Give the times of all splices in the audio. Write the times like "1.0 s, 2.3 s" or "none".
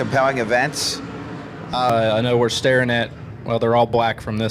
1.9 s